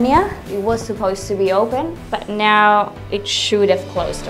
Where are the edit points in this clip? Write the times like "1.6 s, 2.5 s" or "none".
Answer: 2.0 s